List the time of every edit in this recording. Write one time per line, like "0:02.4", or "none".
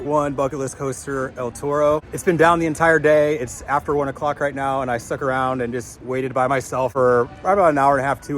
0:02.1
0:06.9